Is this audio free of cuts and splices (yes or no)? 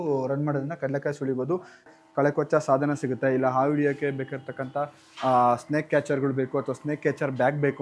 no